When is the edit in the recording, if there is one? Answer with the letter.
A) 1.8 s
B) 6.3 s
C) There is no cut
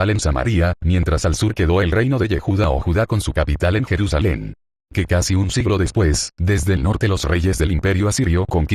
C